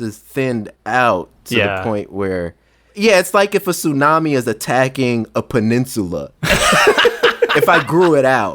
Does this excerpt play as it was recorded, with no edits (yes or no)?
no